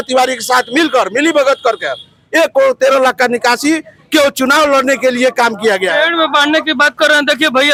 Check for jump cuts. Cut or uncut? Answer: uncut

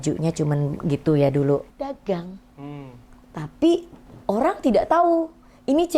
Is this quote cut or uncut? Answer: cut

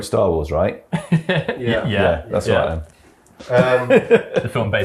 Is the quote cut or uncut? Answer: uncut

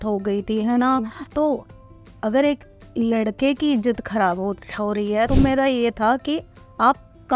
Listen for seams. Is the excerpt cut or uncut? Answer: cut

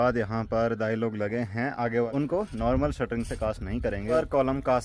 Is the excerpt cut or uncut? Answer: cut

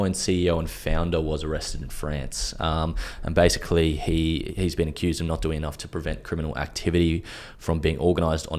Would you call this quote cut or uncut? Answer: uncut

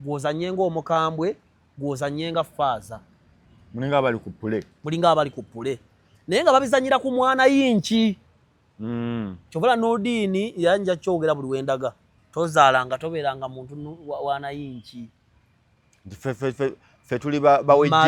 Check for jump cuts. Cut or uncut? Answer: uncut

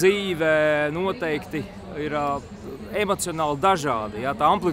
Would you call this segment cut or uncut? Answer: uncut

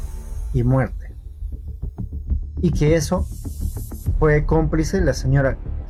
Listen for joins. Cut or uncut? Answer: uncut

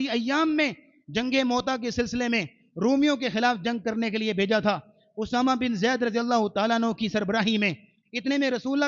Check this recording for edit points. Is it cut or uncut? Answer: uncut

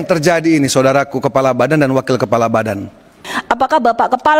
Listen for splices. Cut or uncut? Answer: cut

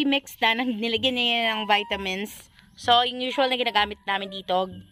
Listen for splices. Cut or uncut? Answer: uncut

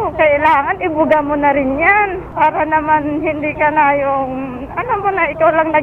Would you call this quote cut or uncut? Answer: uncut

